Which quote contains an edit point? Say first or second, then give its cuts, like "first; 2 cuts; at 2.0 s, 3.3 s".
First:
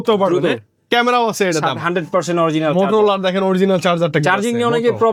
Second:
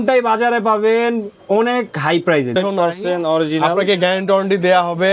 second; 1 cut; at 2.5 s